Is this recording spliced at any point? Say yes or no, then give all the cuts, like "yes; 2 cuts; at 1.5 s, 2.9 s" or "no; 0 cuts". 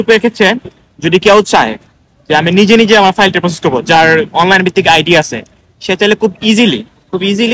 no; 0 cuts